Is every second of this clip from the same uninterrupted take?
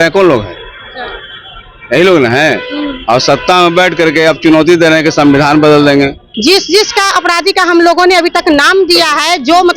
no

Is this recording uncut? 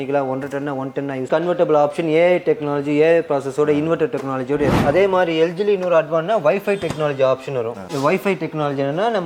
no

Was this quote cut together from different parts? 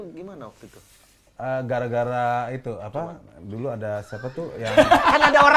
no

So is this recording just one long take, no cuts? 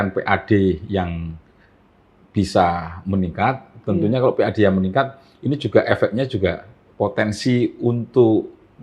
yes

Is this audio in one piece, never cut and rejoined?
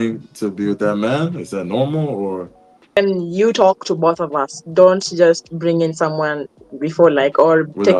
no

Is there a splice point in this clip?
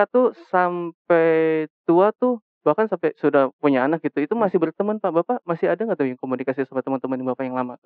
no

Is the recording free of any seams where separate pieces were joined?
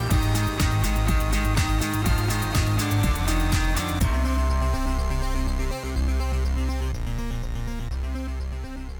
yes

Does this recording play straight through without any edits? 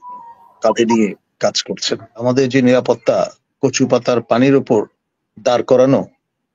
no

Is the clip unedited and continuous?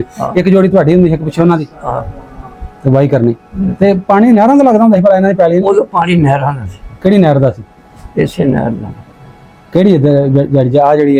yes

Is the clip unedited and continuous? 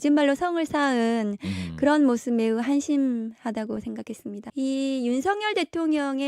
no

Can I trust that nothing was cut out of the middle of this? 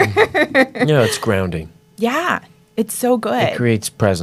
yes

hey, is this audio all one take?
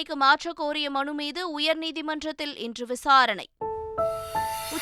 no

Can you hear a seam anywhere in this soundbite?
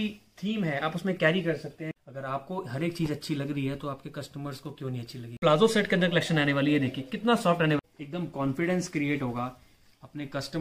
yes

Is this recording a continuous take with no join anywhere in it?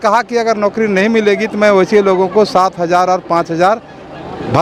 yes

